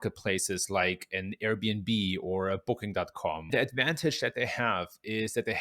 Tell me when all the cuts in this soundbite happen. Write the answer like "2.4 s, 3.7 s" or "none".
3.5 s